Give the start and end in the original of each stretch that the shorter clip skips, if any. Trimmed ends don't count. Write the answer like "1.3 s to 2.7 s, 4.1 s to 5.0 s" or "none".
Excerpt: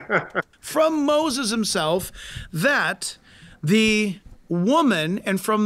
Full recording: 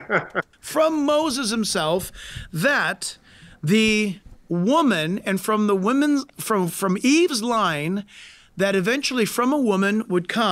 none